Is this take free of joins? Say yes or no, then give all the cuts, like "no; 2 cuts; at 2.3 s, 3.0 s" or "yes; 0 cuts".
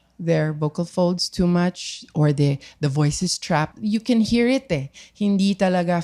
no; 1 cut; at 3.7 s